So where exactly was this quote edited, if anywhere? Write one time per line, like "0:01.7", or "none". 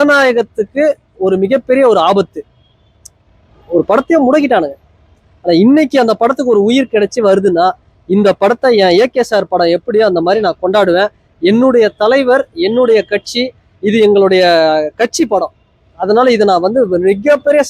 none